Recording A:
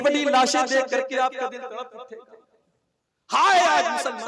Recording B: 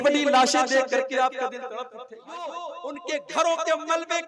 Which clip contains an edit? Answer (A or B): B